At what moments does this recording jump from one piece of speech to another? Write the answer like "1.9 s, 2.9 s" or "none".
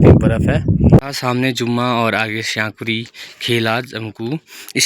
1.0 s